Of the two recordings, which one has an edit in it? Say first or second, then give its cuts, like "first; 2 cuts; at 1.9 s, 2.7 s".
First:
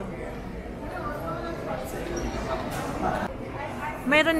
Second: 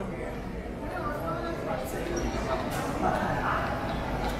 first; 1 cut; at 3.3 s